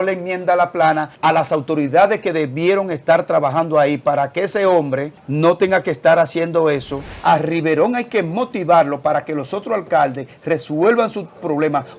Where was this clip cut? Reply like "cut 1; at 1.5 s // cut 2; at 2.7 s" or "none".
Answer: cut 1; at 1.1 s // cut 2; at 5.2 s // cut 3; at 7.1 s